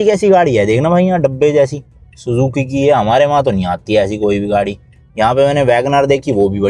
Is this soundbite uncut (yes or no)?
yes